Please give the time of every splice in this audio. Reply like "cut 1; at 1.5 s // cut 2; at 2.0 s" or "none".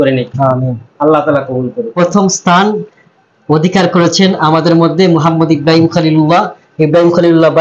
cut 1; at 1.9 s